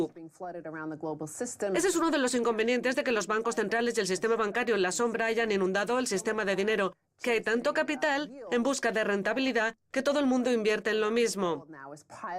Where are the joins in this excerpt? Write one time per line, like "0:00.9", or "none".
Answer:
0:08.3